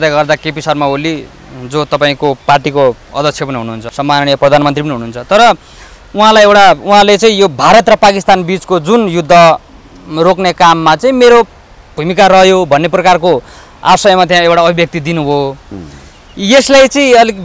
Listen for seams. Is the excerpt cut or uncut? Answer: cut